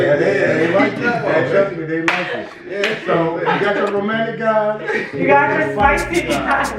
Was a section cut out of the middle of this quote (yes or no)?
no